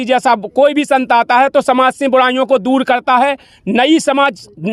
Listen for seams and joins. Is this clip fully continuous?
yes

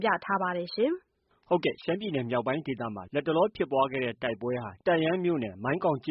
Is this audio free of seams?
no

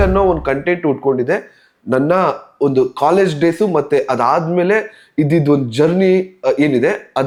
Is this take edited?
no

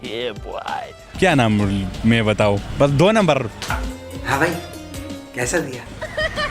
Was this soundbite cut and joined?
yes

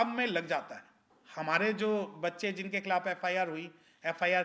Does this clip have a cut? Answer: no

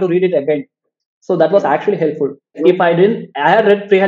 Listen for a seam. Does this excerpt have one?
yes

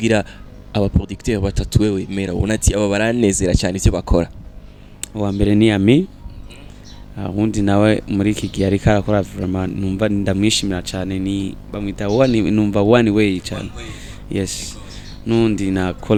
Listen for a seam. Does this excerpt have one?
no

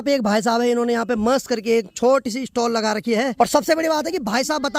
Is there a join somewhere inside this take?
yes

